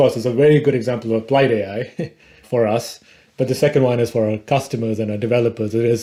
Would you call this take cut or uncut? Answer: uncut